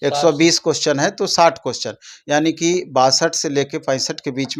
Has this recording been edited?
no; 0 cuts

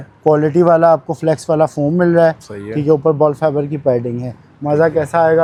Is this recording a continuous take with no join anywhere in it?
yes; 0 cuts

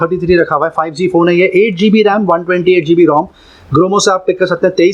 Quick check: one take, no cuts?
yes; 0 cuts

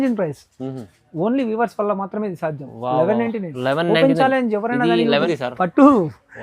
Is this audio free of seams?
no; 1 cut; at 5.2 s

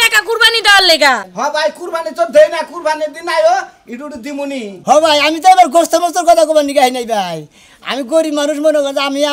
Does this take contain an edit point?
yes; 1 cut; at 1.2 s

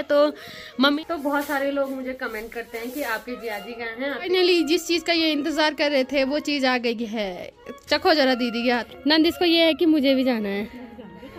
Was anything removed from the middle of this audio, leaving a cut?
yes; 3 cuts; at 1.0 s, 4.3 s, 8.9 s

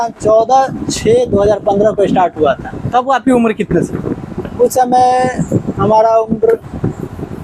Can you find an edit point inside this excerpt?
no; 0 cuts

